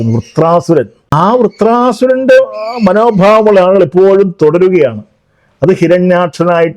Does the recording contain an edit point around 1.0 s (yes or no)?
yes